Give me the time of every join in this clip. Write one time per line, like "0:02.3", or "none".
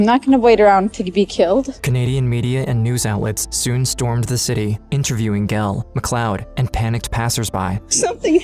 none